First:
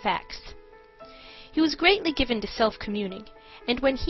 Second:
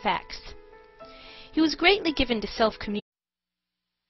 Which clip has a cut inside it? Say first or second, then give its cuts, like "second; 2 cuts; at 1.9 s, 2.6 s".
first; 1 cut; at 3.0 s